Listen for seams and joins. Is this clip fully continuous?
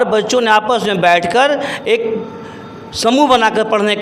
yes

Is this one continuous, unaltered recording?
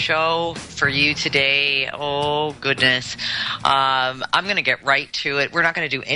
yes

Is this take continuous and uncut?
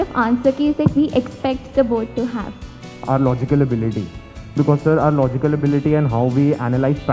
no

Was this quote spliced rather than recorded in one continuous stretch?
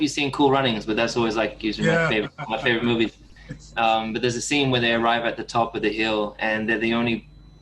no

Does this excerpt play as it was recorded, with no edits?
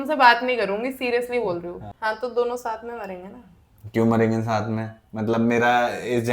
no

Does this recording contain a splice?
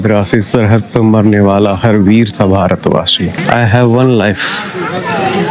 yes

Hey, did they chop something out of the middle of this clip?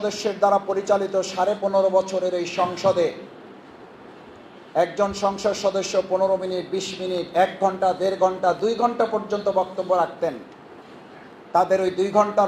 no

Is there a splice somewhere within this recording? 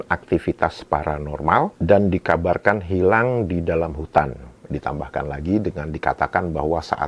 no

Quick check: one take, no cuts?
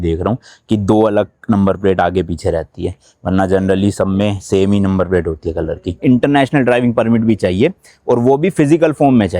no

